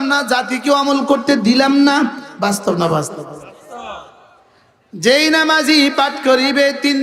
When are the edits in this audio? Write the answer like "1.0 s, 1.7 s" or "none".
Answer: 2.2 s